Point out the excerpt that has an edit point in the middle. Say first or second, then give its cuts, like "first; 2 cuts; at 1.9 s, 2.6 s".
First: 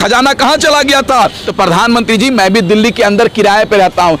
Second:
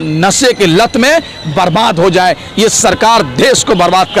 first; 1 cut; at 1.4 s